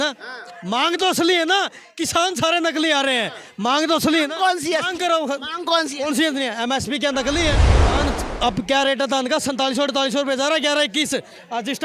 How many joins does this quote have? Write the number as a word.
one